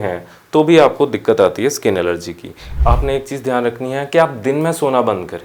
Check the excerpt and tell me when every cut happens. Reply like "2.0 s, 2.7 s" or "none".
2.7 s